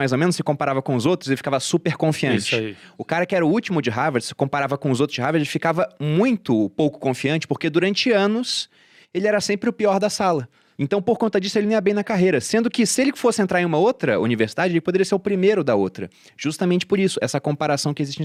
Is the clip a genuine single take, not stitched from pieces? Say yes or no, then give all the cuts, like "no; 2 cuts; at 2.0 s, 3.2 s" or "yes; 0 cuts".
yes; 0 cuts